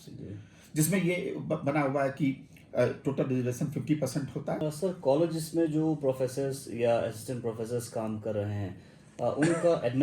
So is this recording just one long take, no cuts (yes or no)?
no